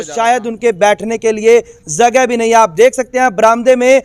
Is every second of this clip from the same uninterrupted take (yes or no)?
yes